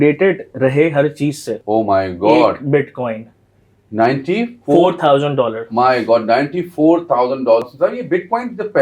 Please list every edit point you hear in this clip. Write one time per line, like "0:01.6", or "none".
0:01.5
0:07.6

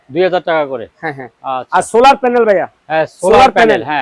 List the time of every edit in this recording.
none

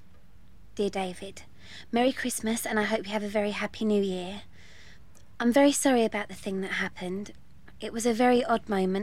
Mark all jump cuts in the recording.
none

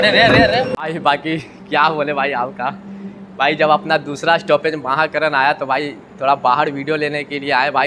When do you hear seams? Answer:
none

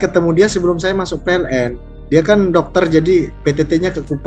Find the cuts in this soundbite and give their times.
none

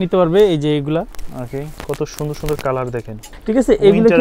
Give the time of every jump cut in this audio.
0:01.7
0:03.3

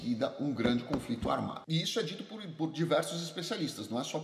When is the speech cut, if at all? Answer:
0:01.6

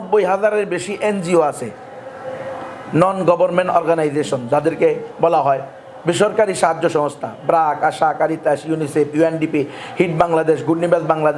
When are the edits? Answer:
none

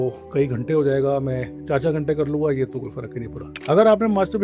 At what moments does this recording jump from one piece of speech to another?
0:03.5

